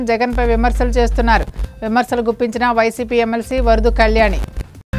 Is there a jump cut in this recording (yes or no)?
no